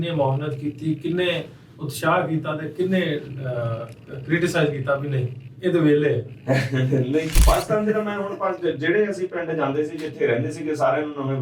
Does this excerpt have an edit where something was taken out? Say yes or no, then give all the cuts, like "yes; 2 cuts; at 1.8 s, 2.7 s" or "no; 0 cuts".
yes; 1 cut; at 7.3 s